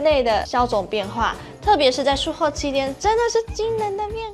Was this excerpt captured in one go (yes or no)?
yes